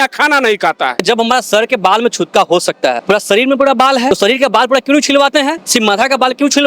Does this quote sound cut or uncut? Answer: cut